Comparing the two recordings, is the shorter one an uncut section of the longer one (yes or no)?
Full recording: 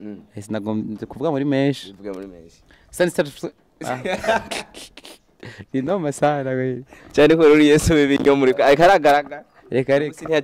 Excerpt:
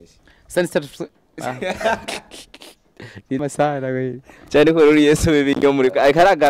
no